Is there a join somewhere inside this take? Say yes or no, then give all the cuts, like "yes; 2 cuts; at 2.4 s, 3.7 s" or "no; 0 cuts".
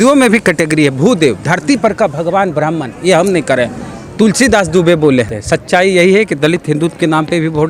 yes; 1 cut; at 5.4 s